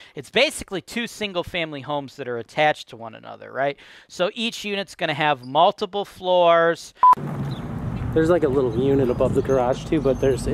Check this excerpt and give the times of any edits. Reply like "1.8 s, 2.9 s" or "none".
7.2 s